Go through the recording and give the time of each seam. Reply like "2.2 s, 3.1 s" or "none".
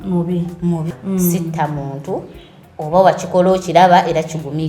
0.9 s